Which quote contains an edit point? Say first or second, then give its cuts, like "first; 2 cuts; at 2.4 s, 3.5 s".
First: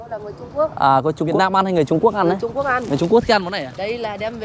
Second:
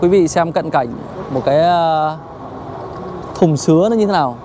first; 1 cut; at 1.3 s